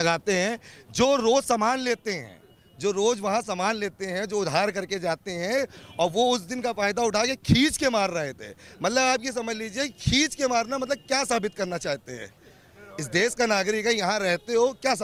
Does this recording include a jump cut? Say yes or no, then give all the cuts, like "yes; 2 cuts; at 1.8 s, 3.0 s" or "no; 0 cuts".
no; 0 cuts